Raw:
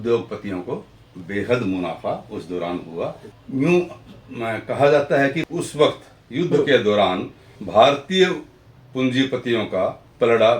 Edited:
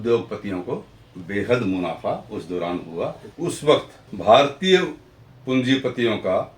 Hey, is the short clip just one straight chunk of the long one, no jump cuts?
no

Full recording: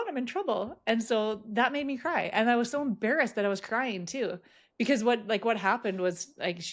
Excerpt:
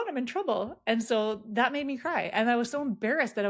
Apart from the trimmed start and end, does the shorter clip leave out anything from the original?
no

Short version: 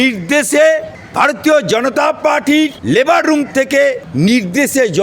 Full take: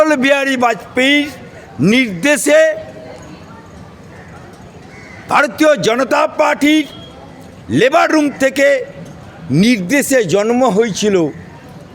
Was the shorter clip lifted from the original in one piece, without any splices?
no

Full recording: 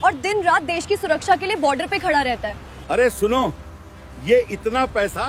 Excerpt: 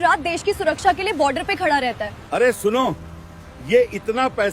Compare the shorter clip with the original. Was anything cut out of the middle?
yes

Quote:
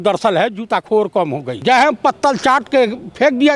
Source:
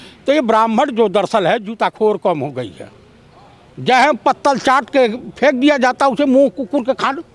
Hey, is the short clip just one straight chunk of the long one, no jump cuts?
no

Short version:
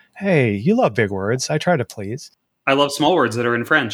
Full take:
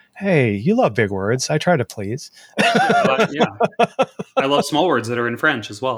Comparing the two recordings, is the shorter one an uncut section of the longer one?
no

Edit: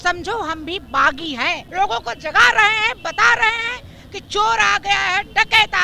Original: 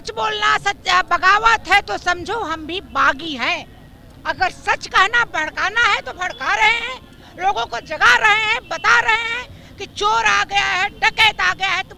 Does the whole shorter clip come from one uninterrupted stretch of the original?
no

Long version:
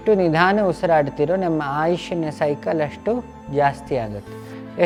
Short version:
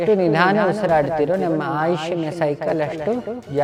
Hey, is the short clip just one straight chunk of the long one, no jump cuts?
yes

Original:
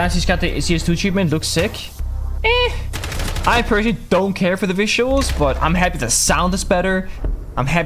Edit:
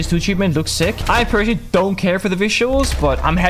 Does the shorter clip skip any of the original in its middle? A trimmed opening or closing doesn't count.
yes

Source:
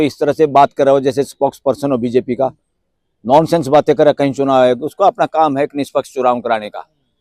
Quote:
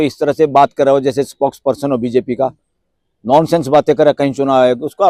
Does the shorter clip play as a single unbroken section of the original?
yes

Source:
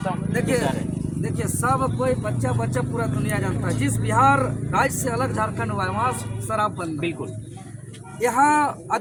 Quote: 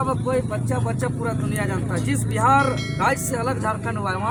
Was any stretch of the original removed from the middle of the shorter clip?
no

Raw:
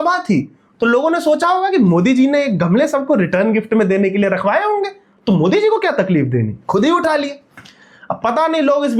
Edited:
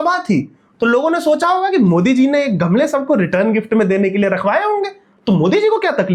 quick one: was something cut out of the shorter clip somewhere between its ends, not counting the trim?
no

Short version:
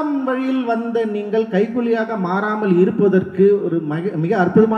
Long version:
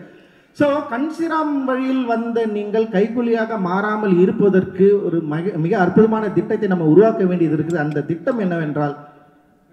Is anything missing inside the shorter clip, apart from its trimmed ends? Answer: no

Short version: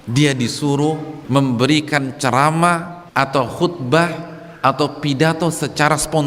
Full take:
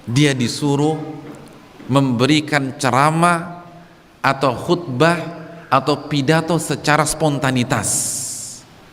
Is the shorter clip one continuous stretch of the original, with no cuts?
no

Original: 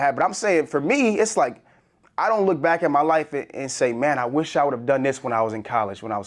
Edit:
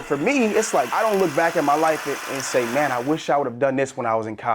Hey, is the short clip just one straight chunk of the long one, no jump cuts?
no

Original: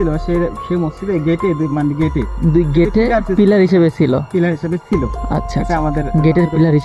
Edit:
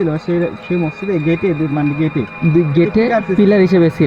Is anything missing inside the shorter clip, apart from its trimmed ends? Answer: no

